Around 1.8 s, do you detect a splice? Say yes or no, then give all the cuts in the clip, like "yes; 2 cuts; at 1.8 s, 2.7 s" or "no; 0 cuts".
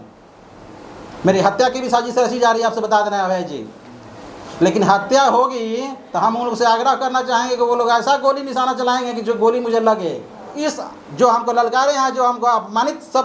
no; 1 cut; at 10.5 s